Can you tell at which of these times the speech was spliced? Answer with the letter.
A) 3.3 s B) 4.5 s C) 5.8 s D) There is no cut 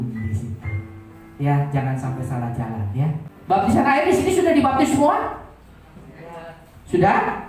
A